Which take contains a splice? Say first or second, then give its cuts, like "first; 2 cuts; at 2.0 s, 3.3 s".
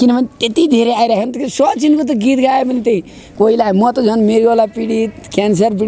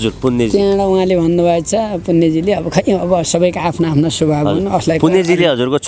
first; 1 cut; at 3.2 s